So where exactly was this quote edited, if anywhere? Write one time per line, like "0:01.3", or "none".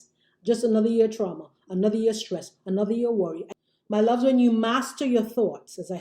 0:03.5